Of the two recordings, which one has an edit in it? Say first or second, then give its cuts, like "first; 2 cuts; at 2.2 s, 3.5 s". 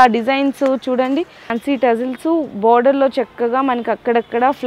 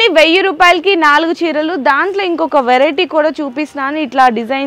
first; 1 cut; at 1.5 s